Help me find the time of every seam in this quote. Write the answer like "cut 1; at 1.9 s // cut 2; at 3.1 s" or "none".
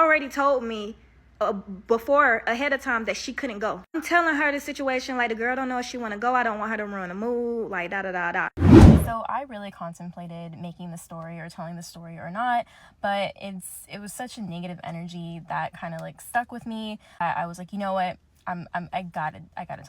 cut 1; at 8.5 s // cut 2; at 9.0 s